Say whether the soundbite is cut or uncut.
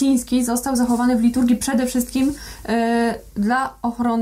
uncut